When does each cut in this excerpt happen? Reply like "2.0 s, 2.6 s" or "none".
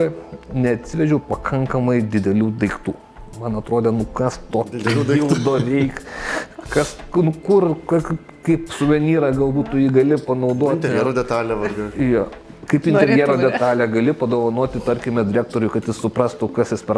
none